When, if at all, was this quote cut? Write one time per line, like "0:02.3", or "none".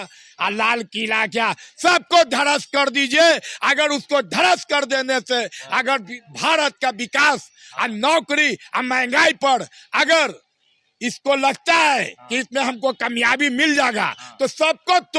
none